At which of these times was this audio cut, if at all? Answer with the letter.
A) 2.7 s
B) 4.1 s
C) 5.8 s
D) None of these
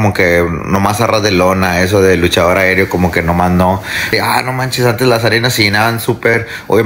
B